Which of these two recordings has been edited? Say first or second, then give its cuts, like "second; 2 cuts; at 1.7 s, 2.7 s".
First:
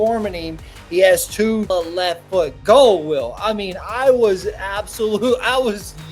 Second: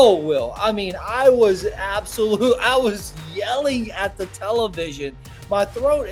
first; 1 cut; at 1.7 s